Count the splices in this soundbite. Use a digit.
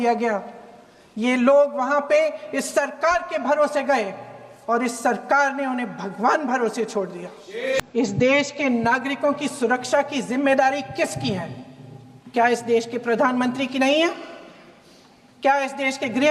1